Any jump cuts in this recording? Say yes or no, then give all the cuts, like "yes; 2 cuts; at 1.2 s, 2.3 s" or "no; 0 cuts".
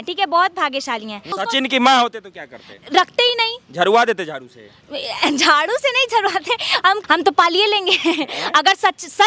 yes; 2 cuts; at 1.4 s, 7.0 s